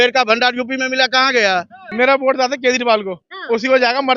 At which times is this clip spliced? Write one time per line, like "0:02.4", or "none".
0:01.8